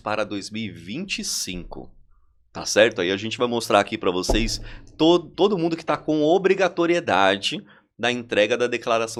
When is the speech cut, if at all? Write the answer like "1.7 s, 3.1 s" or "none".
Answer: none

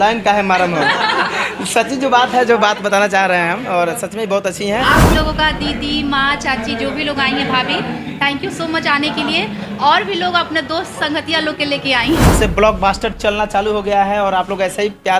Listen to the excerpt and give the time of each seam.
5.1 s, 12.3 s

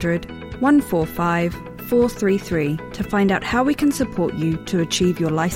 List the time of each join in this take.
none

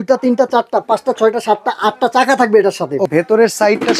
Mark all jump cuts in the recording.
3.1 s

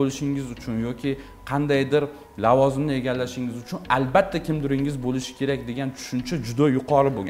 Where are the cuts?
none

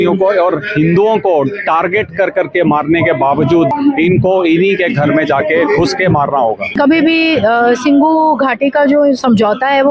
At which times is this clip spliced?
3.7 s, 6.8 s

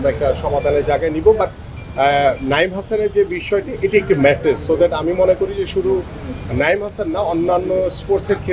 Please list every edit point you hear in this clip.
none

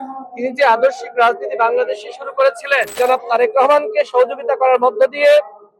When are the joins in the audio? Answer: 3.0 s

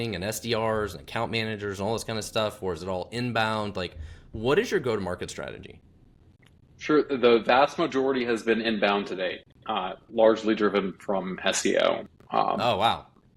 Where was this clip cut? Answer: none

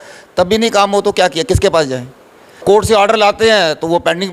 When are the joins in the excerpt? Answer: 2.6 s

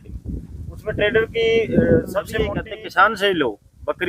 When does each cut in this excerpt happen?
2.6 s

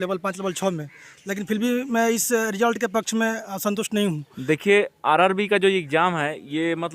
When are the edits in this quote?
4.3 s

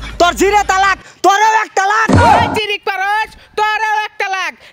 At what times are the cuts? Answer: none

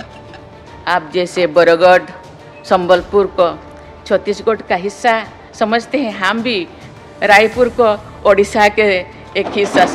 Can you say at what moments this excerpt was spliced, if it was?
none

